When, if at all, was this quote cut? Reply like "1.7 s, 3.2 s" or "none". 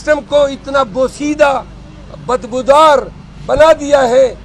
none